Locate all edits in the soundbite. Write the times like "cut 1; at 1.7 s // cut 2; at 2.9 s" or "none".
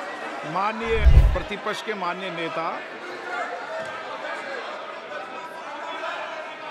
cut 1; at 1.1 s